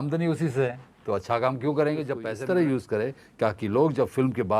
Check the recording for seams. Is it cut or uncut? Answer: cut